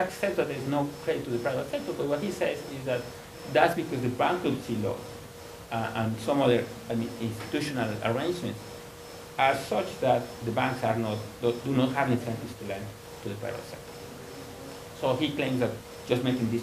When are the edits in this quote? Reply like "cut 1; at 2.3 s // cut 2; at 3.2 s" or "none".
cut 1; at 10.3 s